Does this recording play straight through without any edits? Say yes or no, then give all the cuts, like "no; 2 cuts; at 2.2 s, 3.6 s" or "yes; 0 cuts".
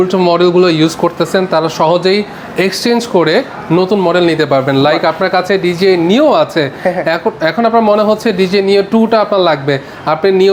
yes; 0 cuts